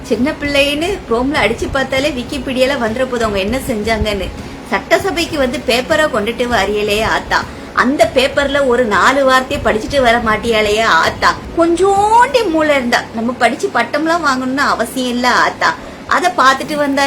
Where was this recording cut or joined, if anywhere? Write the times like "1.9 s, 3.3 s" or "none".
11.4 s